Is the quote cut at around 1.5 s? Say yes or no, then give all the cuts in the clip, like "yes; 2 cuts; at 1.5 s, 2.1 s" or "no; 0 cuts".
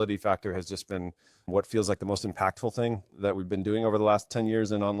yes; 1 cut; at 1.5 s